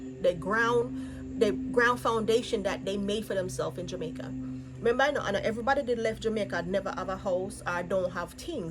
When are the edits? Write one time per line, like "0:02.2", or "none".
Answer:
none